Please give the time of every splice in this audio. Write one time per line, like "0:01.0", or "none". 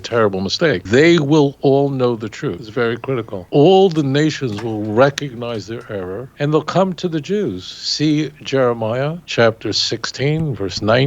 0:00.8
0:02.6
0:03.4
0:06.2
0:09.2